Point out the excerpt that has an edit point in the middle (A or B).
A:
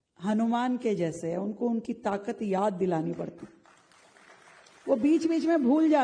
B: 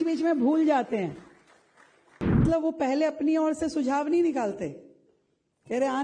B